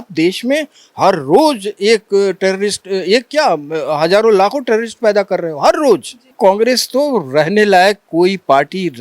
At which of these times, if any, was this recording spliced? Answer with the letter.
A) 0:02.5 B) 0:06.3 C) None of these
B